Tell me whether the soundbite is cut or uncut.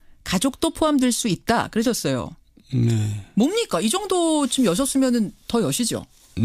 cut